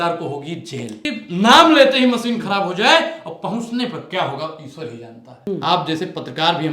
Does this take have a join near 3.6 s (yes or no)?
no